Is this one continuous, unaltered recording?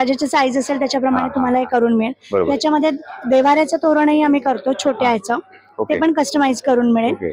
yes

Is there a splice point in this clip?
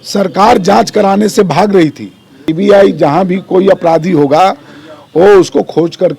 yes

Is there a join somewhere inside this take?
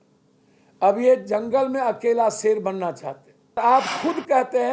yes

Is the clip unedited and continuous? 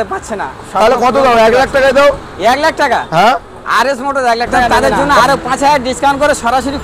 no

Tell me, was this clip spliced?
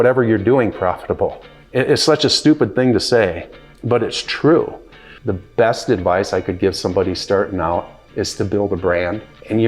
yes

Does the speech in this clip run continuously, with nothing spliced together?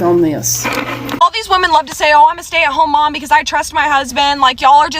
no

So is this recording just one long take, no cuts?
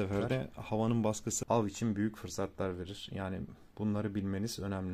no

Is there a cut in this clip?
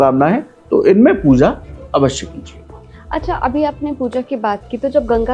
no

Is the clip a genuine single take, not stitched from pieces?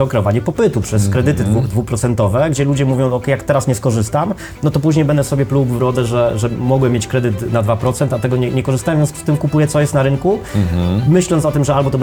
yes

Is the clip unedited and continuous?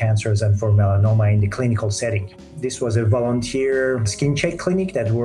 no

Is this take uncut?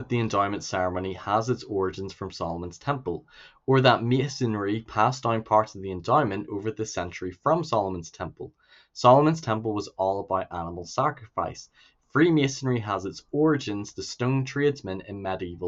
yes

